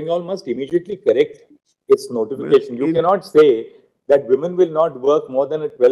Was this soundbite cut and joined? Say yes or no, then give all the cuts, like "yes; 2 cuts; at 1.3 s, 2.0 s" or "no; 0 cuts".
no; 0 cuts